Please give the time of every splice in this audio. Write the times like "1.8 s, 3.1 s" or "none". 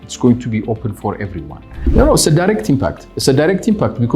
1.9 s